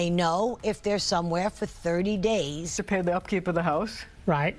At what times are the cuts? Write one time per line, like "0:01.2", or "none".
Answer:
0:02.7